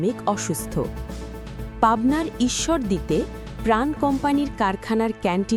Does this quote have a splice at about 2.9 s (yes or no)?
no